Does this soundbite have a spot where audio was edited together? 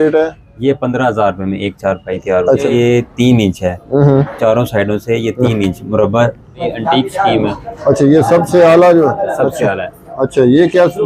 yes; 2 cuts; at 2.7 s, 6.7 s

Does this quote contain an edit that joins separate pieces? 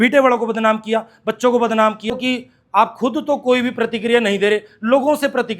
yes; 1 cut; at 2.1 s

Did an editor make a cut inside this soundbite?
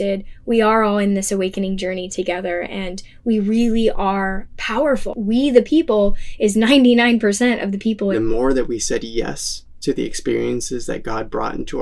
yes; 2 cuts; at 5.1 s, 8.1 s

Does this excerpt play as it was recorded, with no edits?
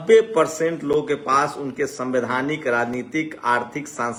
yes; 0 cuts

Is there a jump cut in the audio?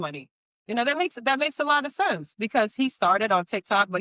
no; 0 cuts

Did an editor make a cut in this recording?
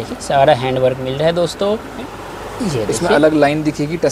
yes; 1 cut; at 2.1 s

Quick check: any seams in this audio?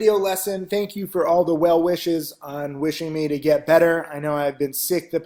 no; 0 cuts

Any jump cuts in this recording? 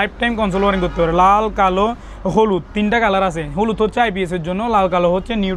no; 0 cuts

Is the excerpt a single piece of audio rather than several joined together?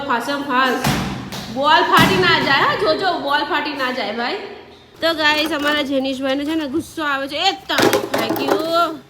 no; 1 cut; at 4.9 s

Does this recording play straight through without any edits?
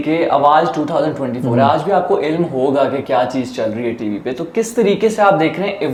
yes; 0 cuts

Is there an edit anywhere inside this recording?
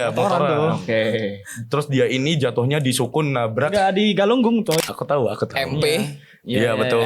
yes; 1 cut; at 4.8 s

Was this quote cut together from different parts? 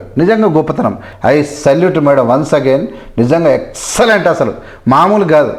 yes; 1 cut; at 1.1 s

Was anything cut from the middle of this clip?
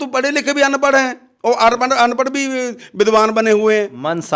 no; 0 cuts

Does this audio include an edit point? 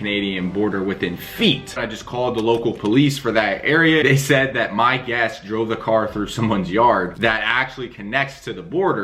yes; 2 cuts; at 1.8 s, 4.0 s

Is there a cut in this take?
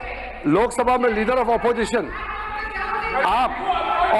no; 0 cuts

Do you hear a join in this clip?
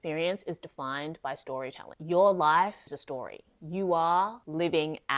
no; 0 cuts

